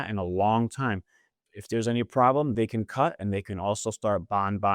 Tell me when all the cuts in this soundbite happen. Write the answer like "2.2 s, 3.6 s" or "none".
2.5 s